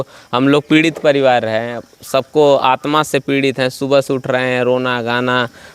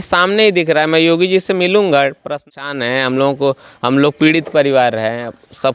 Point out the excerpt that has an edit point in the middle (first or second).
second